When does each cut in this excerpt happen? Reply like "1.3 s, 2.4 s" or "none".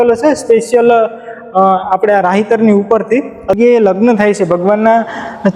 3.6 s